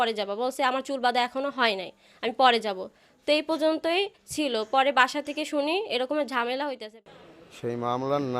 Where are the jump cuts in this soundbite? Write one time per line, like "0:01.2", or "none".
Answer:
0:06.8